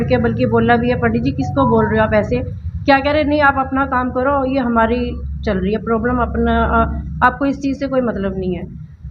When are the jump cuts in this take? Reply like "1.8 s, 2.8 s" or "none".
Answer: none

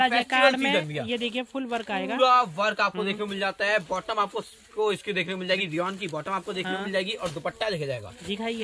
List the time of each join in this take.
none

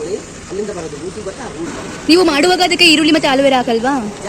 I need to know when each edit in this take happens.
1.7 s

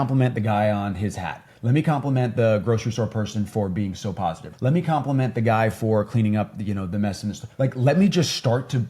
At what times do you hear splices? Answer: 4.5 s, 7.4 s

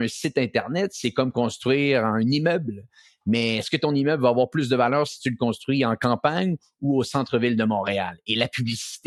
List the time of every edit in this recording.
none

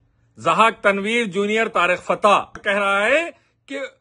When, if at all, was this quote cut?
2.6 s

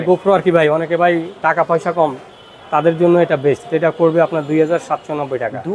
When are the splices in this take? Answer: none

